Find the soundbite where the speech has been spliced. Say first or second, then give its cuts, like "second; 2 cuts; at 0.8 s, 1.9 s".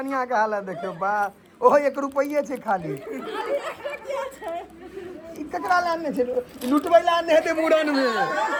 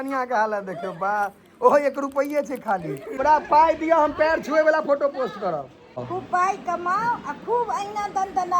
second; 2 cuts; at 3.1 s, 6.1 s